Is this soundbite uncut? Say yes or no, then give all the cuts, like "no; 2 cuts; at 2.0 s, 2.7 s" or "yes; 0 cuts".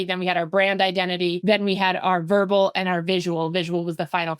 no; 1 cut; at 1.4 s